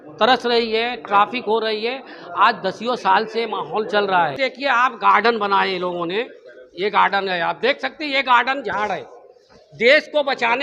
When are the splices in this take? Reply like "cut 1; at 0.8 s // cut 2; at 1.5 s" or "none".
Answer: cut 1; at 4.4 s